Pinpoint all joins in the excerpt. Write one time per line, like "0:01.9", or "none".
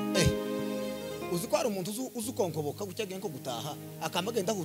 0:01.2